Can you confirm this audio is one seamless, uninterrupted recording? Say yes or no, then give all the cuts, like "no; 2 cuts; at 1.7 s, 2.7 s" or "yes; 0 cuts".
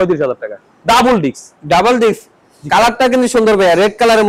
yes; 0 cuts